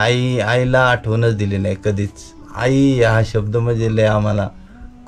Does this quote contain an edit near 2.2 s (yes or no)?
no